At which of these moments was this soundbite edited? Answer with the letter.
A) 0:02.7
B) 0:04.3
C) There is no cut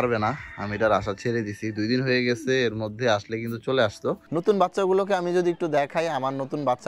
B